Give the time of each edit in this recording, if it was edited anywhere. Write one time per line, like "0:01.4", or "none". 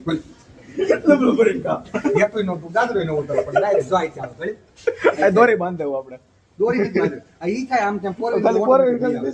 none